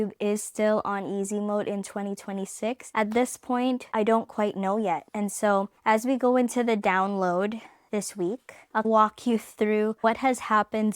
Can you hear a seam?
yes; 4 cuts; at 2.8 s, 3.9 s, 5.1 s, 8.3 s

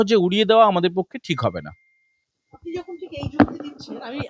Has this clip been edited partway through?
no; 0 cuts

